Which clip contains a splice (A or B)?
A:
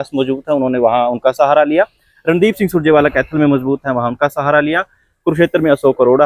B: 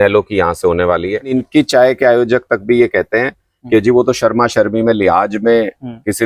B